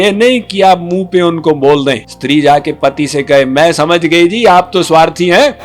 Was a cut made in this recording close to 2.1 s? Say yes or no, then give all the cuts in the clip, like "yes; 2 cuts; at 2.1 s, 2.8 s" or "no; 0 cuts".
yes; 1 cut; at 2.1 s